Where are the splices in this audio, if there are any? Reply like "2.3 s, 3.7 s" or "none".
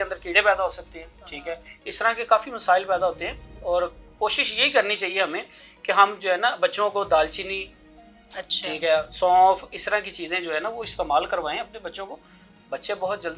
none

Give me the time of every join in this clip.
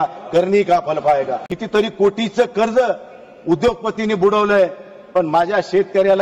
1.4 s

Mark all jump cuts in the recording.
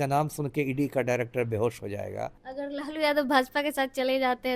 2.4 s

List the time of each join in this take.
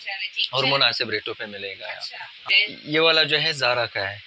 2.4 s

